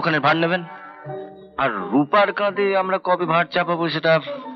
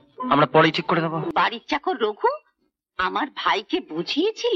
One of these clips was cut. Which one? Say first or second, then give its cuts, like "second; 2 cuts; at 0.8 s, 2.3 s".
second; 1 cut; at 1.3 s